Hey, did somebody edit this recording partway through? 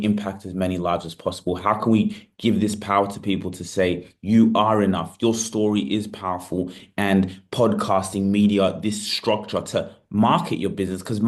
no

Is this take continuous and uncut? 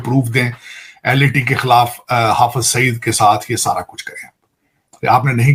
yes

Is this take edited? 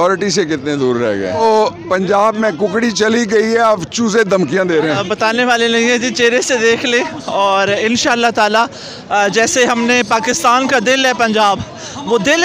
yes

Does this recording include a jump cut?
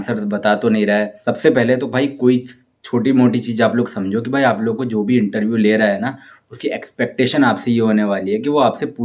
yes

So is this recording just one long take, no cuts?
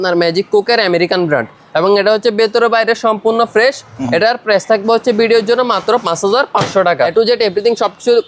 no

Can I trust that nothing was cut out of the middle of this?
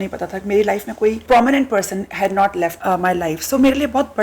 no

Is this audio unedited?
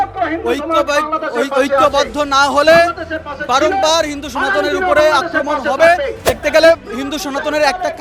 no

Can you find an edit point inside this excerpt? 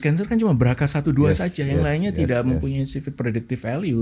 no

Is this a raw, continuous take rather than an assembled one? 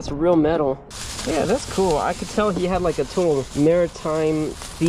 no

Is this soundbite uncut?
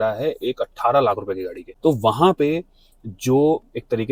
yes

